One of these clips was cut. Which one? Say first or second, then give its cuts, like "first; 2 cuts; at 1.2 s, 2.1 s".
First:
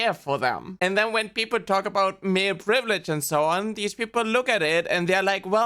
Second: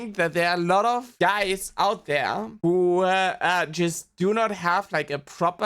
second; 1 cut; at 1.1 s